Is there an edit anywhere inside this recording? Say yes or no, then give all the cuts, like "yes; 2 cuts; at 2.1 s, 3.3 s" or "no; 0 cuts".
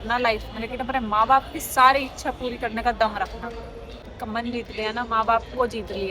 yes; 1 cut; at 4.1 s